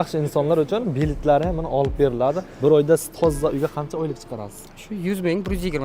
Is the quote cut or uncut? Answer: cut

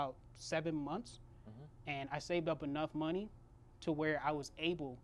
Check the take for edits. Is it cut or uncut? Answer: uncut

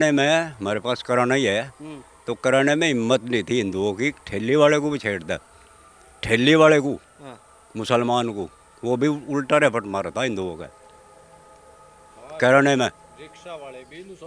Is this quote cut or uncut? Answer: uncut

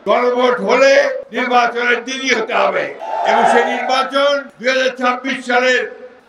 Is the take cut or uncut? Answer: cut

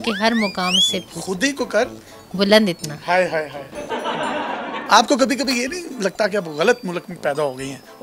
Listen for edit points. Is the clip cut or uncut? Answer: cut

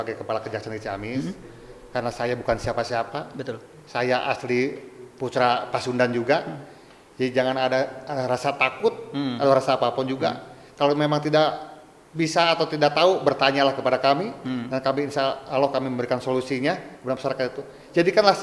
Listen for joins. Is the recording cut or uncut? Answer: uncut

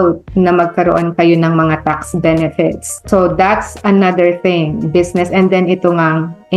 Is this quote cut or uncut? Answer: uncut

